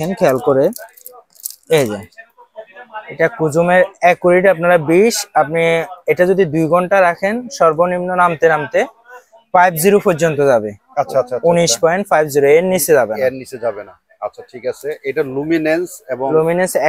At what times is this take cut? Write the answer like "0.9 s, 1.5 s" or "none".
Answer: none